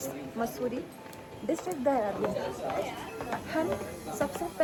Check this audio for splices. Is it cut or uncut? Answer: uncut